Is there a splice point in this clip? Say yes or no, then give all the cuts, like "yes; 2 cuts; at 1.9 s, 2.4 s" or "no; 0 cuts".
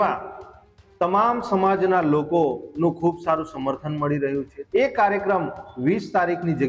yes; 1 cut; at 4.6 s